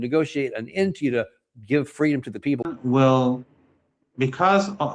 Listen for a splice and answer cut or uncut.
cut